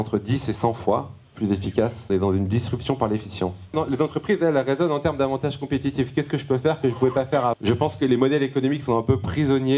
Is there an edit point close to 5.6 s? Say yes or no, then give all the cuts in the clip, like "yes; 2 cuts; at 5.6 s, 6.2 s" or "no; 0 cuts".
no; 3 cuts; at 2.1 s, 3.7 s, 7.6 s